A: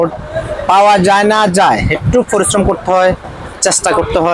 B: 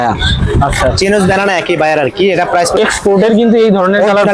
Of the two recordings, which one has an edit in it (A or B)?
B